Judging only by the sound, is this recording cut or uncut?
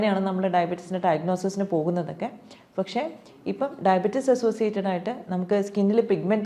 uncut